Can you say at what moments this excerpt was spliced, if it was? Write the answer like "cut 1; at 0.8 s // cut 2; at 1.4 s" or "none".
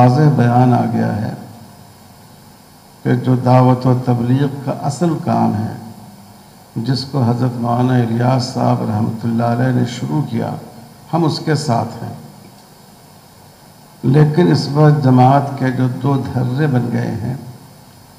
none